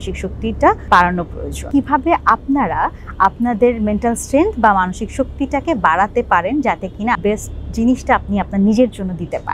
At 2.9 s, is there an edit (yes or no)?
no